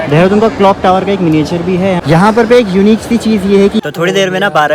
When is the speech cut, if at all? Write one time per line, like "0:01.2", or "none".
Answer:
0:02.0
0:03.8